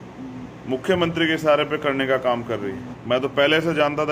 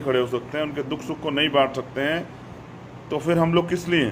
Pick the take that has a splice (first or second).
first